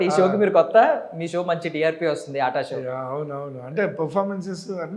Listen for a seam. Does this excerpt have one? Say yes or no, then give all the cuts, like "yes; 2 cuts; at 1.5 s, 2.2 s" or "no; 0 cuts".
no; 0 cuts